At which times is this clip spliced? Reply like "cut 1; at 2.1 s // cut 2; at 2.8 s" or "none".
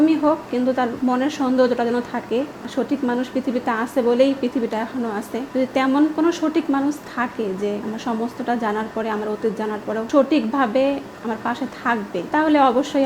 cut 1; at 1.0 s // cut 2; at 2.6 s // cut 3; at 5.4 s // cut 4; at 7.8 s // cut 5; at 10.1 s // cut 6; at 12.3 s